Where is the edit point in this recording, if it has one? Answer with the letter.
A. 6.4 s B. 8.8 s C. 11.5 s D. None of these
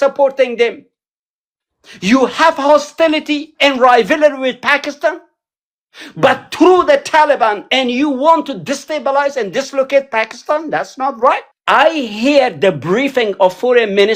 C